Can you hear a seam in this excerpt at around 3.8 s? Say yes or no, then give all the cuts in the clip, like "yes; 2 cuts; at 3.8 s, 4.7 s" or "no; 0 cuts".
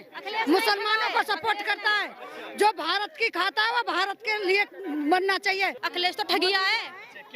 no; 1 cut; at 5.8 s